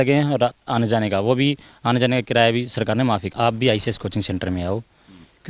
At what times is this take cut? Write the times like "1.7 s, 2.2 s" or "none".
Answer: 3.3 s